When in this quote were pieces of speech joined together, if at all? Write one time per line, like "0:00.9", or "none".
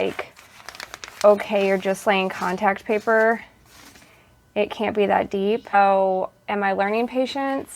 0:05.7

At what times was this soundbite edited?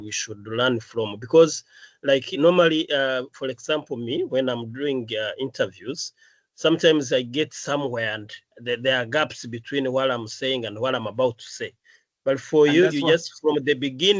none

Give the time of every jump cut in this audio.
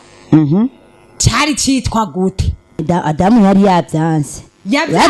0:02.8

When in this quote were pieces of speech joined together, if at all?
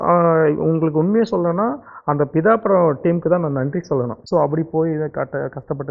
0:04.2

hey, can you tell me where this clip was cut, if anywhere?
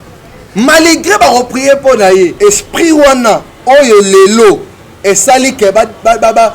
0:02.3

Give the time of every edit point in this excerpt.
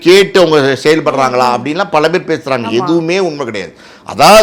none

